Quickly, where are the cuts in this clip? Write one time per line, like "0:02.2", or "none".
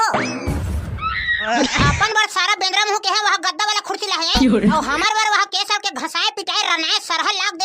0:01.5